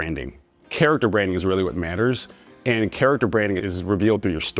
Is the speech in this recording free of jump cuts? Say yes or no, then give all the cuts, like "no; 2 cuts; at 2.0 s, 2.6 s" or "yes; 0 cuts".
no; 1 cut; at 3.7 s